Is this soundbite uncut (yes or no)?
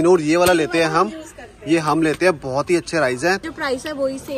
no